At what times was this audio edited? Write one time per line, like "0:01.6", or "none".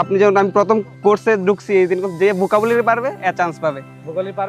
none